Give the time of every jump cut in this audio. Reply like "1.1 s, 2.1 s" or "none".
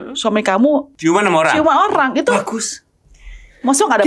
0.9 s